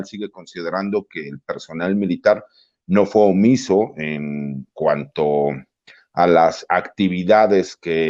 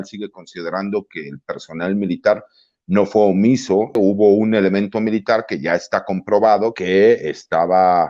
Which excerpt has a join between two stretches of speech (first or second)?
second